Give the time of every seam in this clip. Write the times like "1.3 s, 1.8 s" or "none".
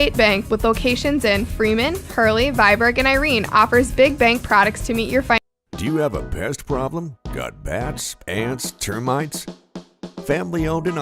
5.4 s